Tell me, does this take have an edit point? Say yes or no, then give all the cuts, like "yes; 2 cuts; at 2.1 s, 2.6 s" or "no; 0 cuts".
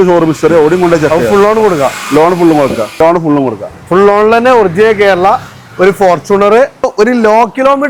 yes; 2 cuts; at 3.0 s, 6.9 s